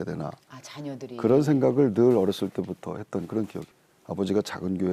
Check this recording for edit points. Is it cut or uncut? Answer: cut